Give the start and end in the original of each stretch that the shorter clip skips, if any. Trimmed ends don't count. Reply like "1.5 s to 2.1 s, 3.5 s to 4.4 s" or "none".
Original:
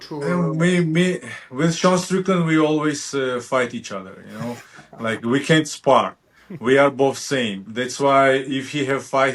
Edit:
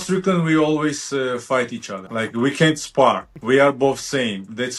4.0 s to 4.9 s, 6.2 s to 6.5 s